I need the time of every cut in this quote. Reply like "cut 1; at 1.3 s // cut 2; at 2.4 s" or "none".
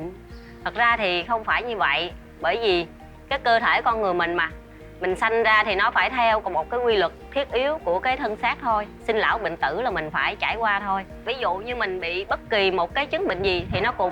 cut 1; at 11.3 s